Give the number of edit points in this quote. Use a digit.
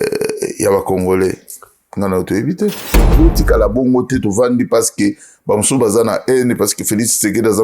1